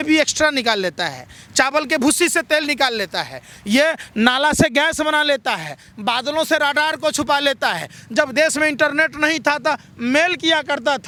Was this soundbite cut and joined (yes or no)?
no